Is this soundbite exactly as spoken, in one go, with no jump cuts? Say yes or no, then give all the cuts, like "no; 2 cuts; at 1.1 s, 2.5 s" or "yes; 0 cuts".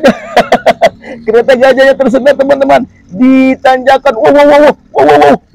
yes; 0 cuts